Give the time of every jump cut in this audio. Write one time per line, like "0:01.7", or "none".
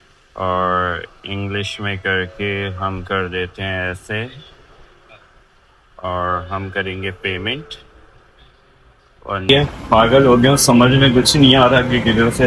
0:09.5